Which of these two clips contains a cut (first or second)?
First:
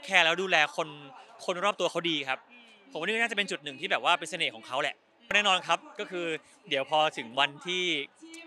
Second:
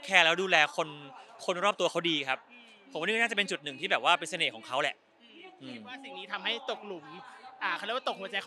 first